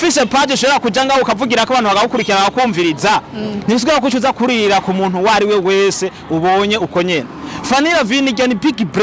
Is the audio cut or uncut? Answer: uncut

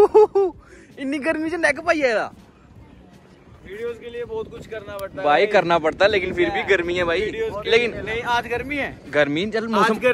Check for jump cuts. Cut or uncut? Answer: uncut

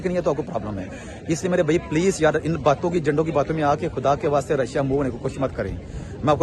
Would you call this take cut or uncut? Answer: uncut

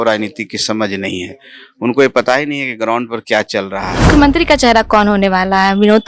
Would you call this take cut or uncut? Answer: cut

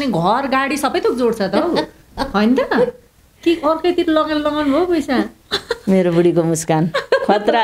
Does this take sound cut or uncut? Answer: uncut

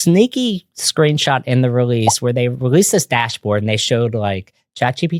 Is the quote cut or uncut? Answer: uncut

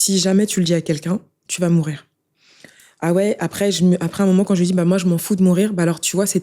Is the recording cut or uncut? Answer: uncut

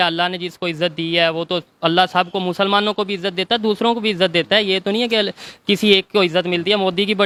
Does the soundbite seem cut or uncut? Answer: uncut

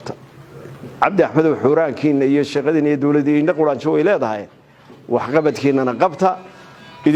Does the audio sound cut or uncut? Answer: uncut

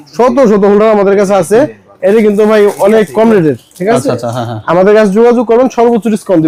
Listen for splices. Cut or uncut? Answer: uncut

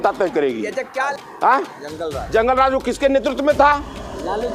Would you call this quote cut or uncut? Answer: cut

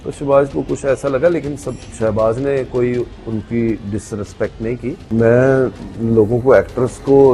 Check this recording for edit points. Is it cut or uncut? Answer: cut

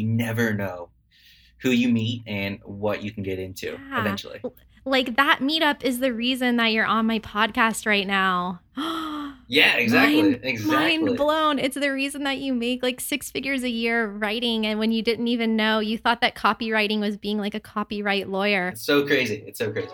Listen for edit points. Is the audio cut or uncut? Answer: cut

